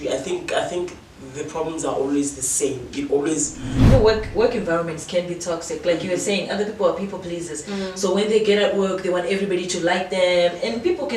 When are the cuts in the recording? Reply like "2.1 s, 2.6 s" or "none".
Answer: 3.6 s